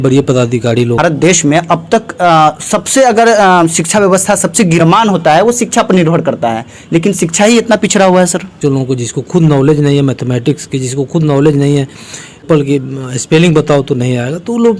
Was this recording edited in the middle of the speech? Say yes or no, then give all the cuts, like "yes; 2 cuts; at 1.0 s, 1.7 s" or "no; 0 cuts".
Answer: yes; 4 cuts; at 1.0 s, 4.8 s, 8.5 s, 12.4 s